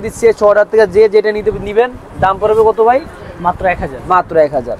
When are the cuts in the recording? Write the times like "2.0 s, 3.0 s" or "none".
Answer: none